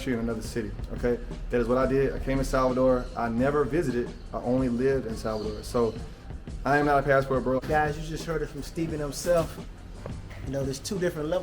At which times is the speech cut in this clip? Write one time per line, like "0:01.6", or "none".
0:07.6